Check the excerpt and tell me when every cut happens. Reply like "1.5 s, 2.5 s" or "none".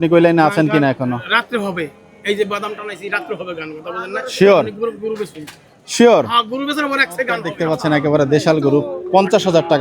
7.5 s